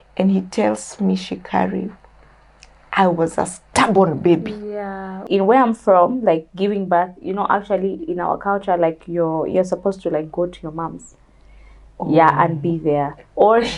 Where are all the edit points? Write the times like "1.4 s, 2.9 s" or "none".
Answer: 5.2 s